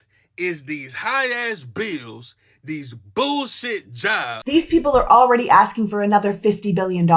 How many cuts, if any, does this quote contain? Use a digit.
1